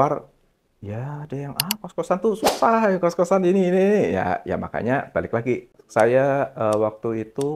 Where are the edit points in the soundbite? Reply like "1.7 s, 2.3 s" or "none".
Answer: 5.8 s